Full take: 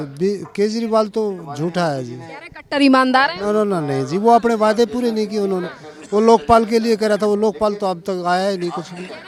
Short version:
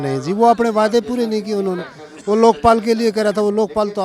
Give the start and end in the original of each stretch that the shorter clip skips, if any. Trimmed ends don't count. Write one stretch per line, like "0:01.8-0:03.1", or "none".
none